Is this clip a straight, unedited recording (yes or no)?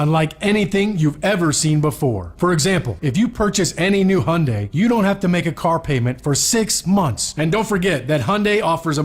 no